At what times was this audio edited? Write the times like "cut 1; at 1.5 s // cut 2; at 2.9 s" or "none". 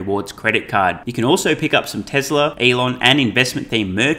cut 1; at 2.5 s